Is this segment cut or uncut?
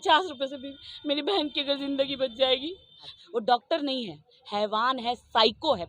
cut